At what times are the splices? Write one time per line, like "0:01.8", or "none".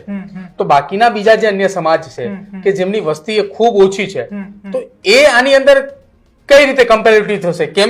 none